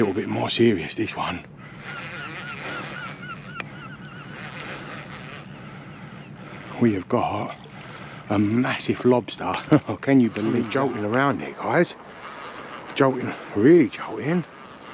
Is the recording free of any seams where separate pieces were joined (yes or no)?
no